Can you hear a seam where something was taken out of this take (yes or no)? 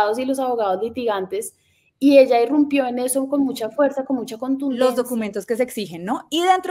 yes